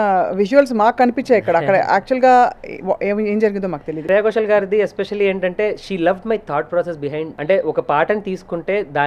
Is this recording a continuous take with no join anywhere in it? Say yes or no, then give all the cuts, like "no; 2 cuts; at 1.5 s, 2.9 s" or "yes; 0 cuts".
no; 2 cuts; at 4.0 s, 7.3 s